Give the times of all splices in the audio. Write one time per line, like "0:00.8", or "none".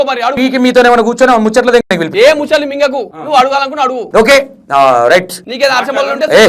0:03.1
0:04.0
0:05.4